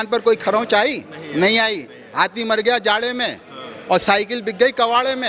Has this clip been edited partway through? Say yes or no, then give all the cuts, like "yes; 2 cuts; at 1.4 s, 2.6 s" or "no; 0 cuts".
no; 0 cuts